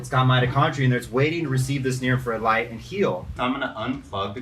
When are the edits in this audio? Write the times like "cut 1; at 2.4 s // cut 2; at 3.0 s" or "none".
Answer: cut 1; at 3.3 s